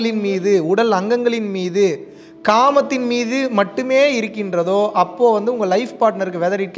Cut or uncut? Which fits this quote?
uncut